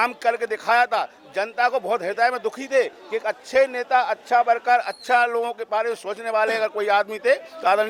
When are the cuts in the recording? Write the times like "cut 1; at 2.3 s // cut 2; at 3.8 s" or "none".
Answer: none